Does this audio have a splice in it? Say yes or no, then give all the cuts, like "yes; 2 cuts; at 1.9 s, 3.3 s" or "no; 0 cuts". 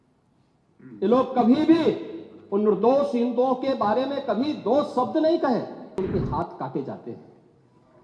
yes; 1 cut; at 6.0 s